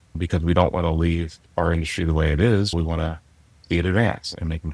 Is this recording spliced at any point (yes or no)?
yes